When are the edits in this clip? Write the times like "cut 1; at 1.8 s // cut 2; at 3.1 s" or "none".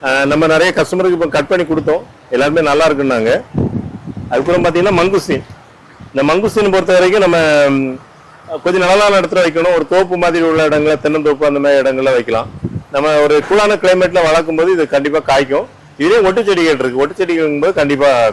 none